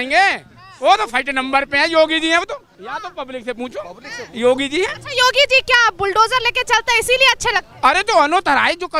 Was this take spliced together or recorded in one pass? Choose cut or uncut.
uncut